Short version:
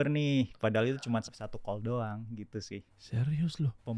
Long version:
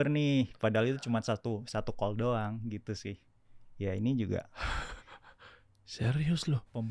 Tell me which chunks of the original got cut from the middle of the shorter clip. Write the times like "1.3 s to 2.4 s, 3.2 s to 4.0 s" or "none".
1.2 s to 1.6 s, 3.3 s to 5.9 s